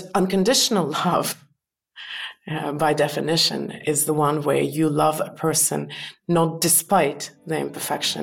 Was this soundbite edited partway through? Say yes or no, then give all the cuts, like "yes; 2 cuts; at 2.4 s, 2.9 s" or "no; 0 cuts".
no; 0 cuts